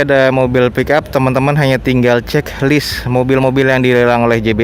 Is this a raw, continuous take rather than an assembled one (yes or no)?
yes